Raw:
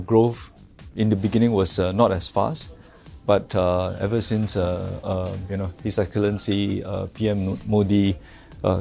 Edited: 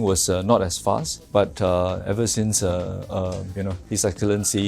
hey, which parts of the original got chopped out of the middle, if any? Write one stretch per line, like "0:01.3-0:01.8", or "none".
0:02.6-0:03.1